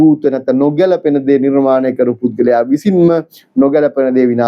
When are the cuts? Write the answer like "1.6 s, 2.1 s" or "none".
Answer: none